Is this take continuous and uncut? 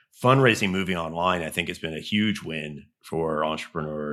yes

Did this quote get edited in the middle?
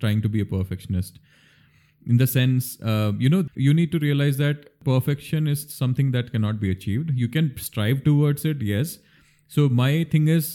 yes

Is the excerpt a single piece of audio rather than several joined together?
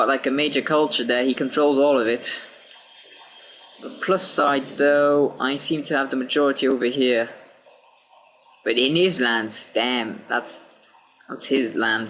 yes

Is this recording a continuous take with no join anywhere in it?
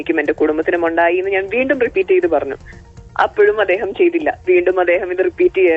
yes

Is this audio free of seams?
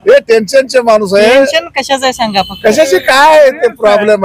yes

